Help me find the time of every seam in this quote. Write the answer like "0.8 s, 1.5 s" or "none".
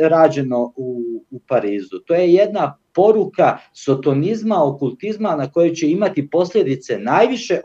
none

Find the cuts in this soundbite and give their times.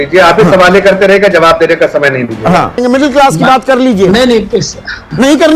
2.8 s

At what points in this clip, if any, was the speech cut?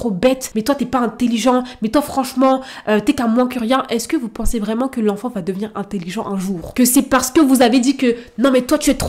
none

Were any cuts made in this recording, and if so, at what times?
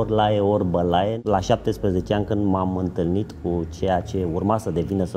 1.1 s

